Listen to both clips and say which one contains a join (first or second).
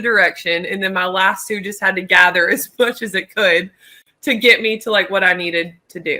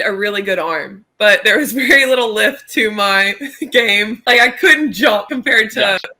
second